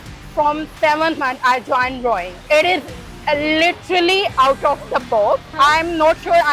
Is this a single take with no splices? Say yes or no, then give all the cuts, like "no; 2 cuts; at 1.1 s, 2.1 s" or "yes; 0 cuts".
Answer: no; 2 cuts; at 2.3 s, 5.5 s